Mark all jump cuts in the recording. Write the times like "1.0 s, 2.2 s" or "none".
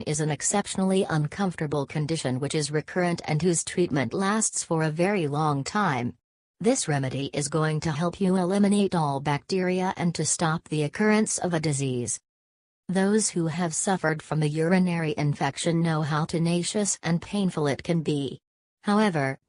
none